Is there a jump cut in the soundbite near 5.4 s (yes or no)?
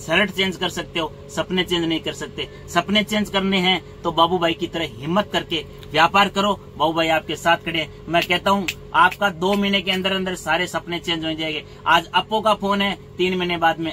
no